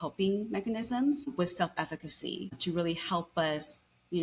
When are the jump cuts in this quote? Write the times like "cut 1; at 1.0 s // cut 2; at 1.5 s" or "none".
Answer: cut 1; at 1.3 s // cut 2; at 2.6 s